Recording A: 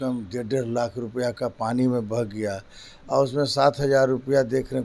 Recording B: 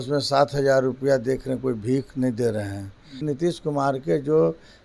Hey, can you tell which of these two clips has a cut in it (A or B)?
B